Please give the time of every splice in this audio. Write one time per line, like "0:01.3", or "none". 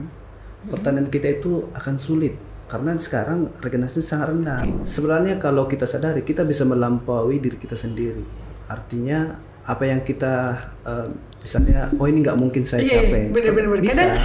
0:04.6